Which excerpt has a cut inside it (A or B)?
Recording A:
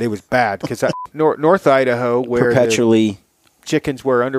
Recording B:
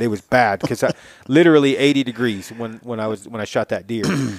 A